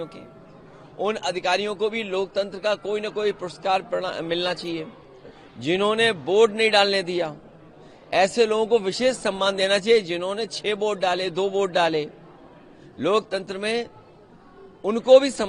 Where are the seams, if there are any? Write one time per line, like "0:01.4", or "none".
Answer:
none